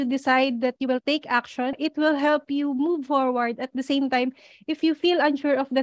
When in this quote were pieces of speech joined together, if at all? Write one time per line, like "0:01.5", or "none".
0:01.7